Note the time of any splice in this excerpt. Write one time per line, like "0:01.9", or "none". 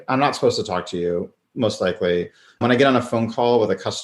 0:01.4
0:02.6